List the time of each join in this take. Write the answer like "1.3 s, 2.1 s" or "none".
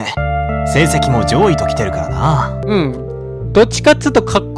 2.6 s